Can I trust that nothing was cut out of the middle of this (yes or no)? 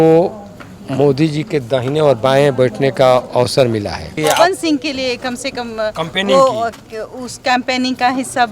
no